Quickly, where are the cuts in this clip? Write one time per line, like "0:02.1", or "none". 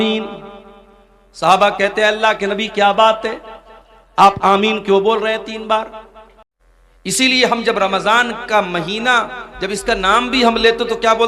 0:06.7